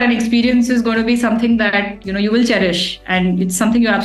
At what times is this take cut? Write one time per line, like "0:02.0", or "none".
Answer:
none

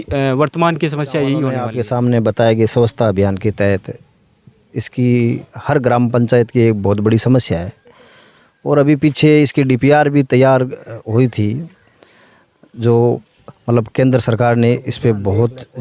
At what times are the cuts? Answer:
0:01.7

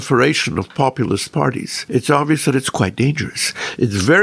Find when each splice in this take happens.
0:01.7

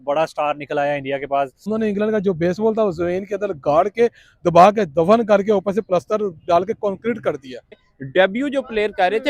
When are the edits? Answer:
0:01.7
0:07.7

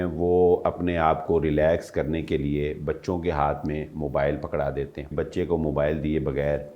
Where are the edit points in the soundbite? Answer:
0:05.0

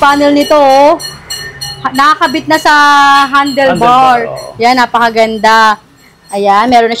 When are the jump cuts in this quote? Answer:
none

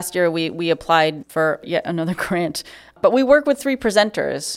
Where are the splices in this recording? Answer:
0:01.4
0:03.0

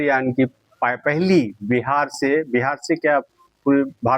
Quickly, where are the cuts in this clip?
none

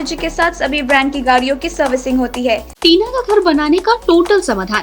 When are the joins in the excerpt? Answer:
0:02.7

